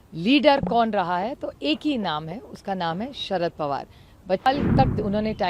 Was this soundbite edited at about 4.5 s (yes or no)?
yes